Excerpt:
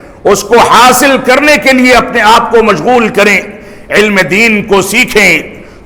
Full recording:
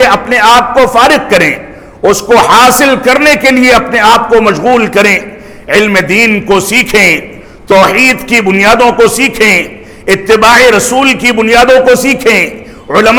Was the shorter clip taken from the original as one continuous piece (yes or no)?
yes